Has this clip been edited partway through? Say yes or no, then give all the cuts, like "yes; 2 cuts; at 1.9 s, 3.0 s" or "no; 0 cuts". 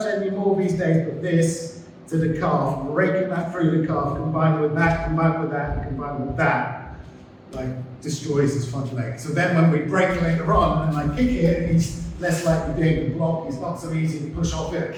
no; 0 cuts